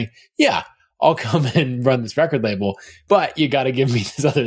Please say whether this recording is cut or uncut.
cut